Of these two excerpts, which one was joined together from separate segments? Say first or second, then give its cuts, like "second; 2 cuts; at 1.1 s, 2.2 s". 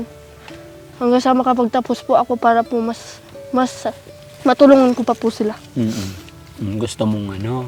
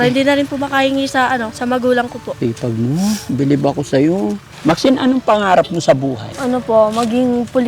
second; 4 cuts; at 1.5 s, 2.2 s, 4.5 s, 6.3 s